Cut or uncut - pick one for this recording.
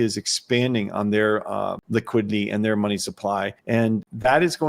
cut